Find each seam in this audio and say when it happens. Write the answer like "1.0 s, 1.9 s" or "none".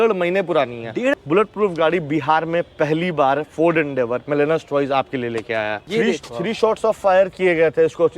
1.2 s, 5.8 s